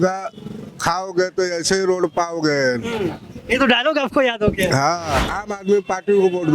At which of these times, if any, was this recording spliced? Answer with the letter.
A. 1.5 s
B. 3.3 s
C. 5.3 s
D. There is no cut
C